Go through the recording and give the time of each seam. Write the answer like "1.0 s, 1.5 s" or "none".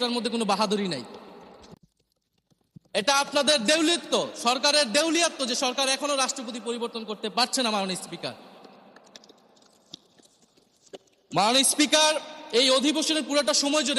none